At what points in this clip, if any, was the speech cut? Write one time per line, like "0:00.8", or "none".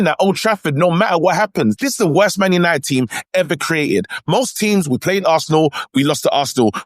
0:01.8